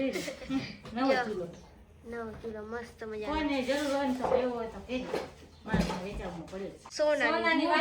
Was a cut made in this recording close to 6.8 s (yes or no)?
yes